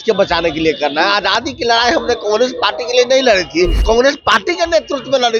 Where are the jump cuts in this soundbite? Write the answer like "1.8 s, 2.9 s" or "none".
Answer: 3.8 s